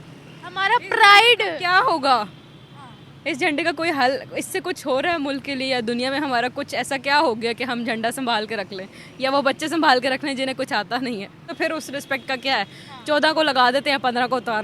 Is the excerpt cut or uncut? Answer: cut